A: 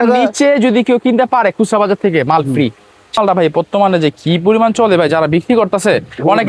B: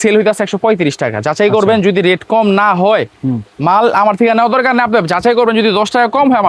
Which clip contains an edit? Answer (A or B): A